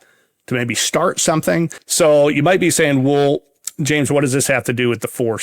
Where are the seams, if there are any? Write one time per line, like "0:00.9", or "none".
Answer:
0:01.8